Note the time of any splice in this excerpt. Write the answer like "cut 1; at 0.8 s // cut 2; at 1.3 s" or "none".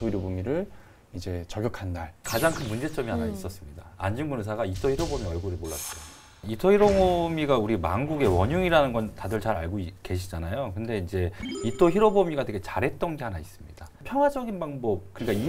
cut 1; at 2.2 s // cut 2; at 6.4 s // cut 3; at 14.0 s